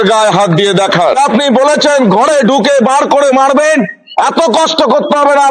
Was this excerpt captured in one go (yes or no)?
no